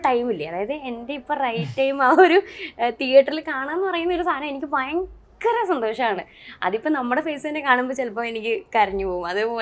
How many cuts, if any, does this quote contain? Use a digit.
0